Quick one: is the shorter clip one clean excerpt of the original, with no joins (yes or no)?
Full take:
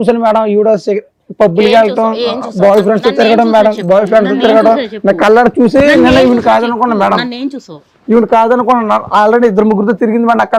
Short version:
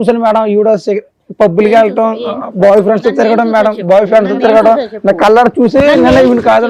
yes